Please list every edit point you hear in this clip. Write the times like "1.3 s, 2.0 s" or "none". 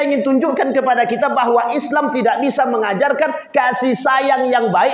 none